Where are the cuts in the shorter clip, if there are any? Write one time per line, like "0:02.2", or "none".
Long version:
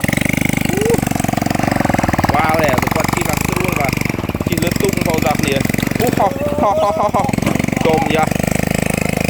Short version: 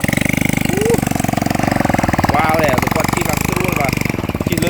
none